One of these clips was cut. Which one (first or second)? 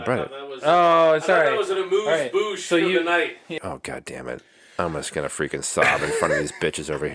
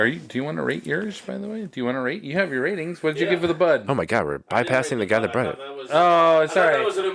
first